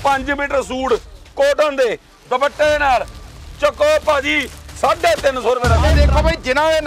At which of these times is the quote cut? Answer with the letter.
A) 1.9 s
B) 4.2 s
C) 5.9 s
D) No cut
C